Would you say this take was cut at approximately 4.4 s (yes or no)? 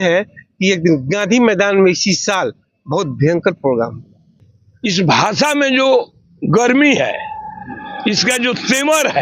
yes